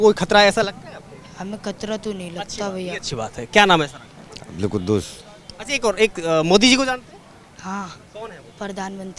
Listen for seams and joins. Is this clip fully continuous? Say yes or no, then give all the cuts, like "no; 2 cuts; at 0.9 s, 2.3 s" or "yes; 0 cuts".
yes; 0 cuts